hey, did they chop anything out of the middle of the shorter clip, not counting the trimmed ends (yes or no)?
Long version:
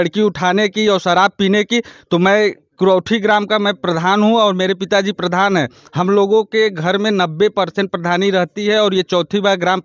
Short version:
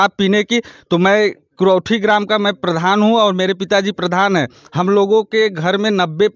no